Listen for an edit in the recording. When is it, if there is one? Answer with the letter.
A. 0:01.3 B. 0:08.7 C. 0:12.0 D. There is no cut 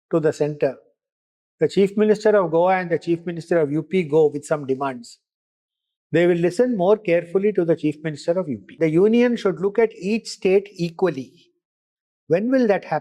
B